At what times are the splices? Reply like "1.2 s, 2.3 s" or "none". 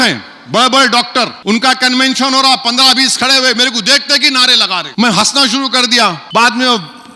1.4 s, 4.9 s, 6.2 s